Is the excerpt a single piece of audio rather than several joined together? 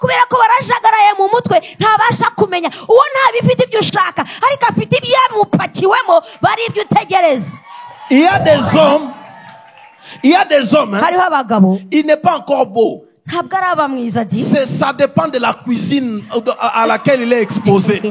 yes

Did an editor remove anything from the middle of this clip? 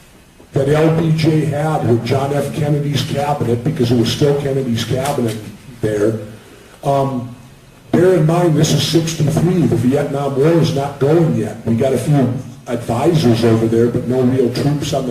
no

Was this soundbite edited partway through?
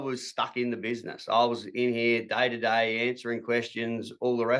no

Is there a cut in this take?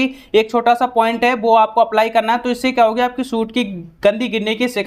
no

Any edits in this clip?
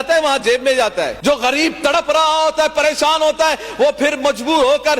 yes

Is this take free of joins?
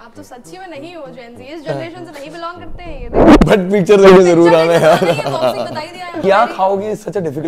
no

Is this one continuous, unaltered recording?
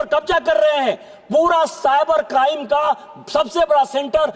yes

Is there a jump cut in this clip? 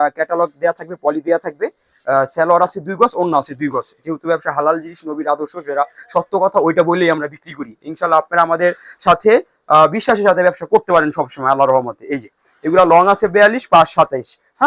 no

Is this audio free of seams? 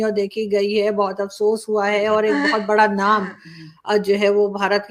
yes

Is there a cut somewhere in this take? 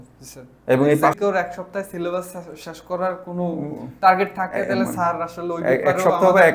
yes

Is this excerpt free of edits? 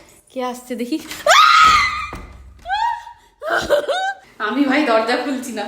no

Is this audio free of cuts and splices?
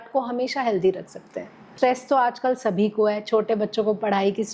no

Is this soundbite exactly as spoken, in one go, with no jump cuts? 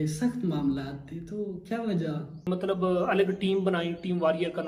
no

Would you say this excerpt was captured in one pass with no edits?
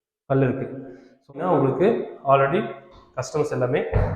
no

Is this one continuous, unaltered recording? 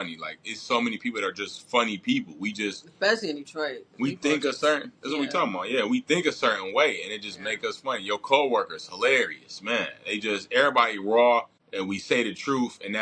no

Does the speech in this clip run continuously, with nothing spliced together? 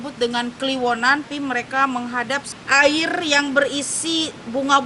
no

